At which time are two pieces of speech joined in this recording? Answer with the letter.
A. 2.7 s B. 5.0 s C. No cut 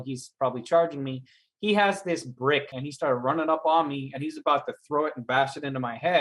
A